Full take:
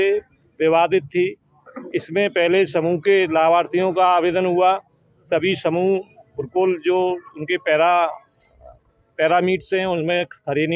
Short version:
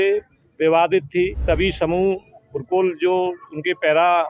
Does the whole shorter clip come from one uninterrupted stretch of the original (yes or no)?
no